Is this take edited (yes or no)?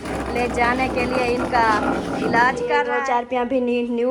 yes